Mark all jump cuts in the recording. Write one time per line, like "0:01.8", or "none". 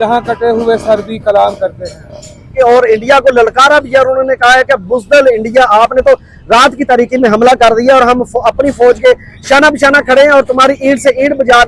0:02.5